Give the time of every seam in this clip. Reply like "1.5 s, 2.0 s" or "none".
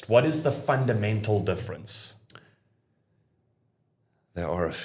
none